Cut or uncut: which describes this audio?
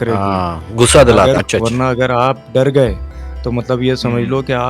cut